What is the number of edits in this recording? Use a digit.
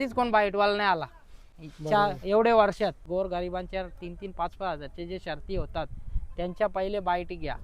1